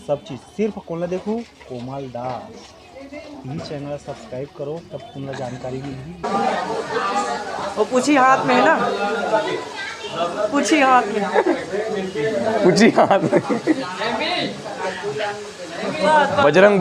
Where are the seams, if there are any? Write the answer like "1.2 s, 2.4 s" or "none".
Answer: 6.3 s